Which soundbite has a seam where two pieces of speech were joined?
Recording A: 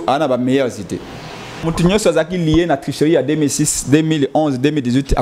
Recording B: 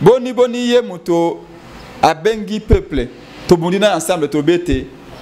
A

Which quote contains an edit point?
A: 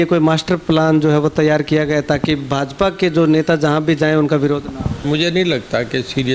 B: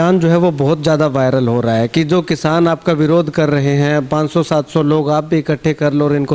A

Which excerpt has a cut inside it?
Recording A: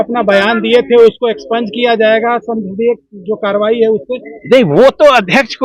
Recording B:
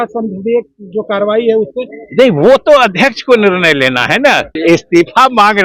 B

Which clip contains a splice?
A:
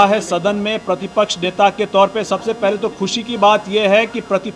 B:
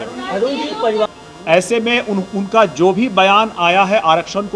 B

